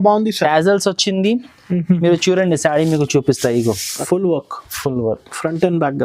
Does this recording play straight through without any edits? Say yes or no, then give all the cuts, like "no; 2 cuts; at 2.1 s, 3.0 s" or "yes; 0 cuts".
no; 1 cut; at 3.9 s